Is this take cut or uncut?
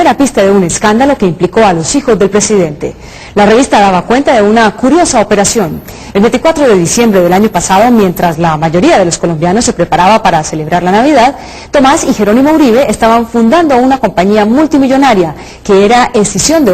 cut